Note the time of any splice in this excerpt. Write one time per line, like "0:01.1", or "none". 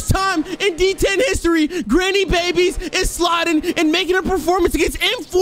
none